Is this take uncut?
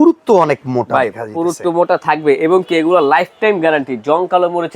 yes; 0 cuts

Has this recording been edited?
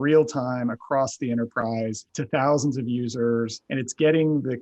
yes; 2 cuts; at 2.1 s, 3.6 s

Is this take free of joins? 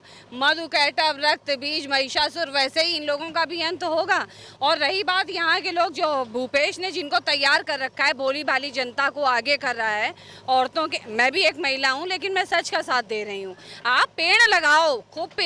yes; 0 cuts

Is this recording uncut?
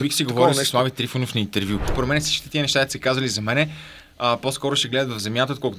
no; 1 cut; at 1.9 s

